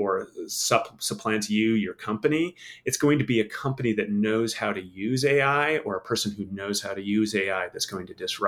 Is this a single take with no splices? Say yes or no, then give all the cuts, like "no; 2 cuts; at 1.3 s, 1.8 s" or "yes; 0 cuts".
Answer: yes; 0 cuts